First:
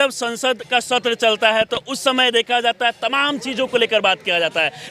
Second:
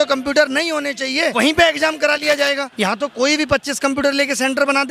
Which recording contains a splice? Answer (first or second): second